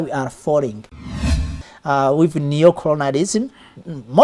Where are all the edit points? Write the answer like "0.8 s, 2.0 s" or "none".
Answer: 1.2 s